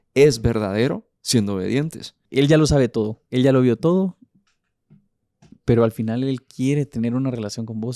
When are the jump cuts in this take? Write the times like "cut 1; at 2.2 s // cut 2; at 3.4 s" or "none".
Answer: cut 1; at 2.2 s